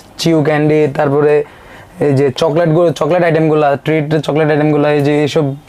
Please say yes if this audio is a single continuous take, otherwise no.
yes